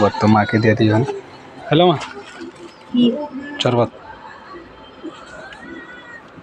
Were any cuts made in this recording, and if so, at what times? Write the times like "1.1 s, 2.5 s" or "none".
none